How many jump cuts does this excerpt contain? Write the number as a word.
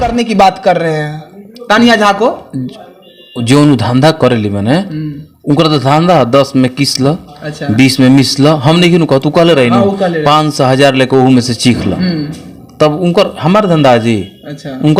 zero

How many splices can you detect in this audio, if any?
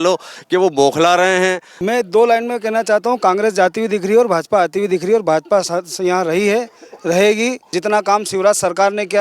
two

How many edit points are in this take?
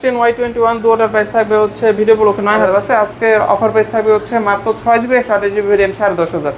one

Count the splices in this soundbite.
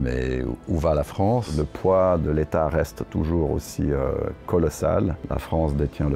two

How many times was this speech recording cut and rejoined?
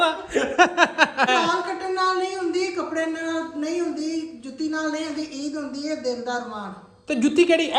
one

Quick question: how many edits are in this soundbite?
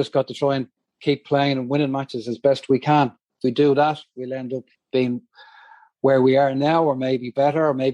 zero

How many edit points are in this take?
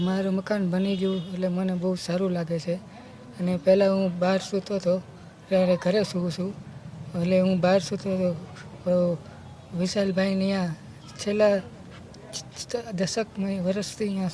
zero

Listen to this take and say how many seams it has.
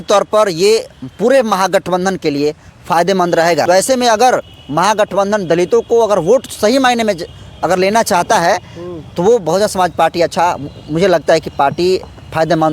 one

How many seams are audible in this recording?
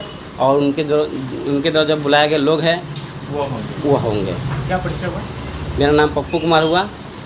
zero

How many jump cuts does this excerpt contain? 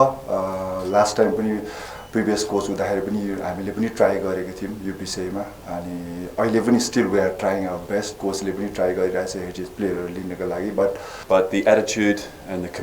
one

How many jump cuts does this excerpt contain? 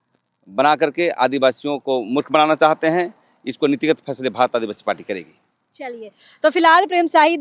zero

